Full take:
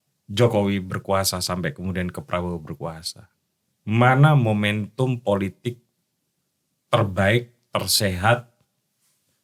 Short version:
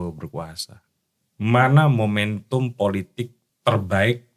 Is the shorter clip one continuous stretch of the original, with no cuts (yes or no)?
no